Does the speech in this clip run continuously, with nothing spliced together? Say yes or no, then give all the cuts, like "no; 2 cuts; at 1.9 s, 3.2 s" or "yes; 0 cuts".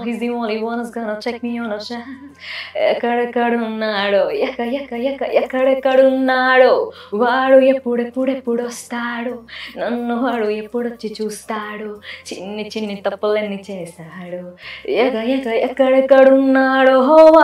yes; 0 cuts